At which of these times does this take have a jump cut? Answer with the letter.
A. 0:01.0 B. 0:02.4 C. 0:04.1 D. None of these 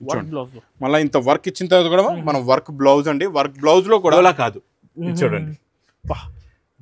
C